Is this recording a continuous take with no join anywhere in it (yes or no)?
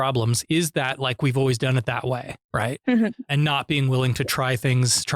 no